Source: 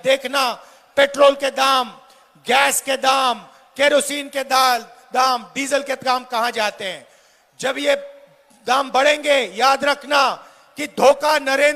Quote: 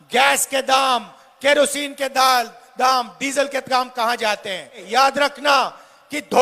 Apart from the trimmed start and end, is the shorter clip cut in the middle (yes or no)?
yes